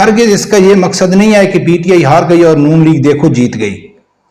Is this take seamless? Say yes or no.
yes